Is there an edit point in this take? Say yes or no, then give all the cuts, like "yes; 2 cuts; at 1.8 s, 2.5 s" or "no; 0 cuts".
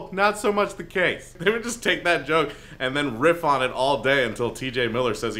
yes; 1 cut; at 1.3 s